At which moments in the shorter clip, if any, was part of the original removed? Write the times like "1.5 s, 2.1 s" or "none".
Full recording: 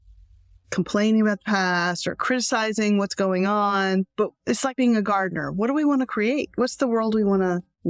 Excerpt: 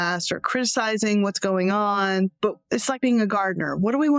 none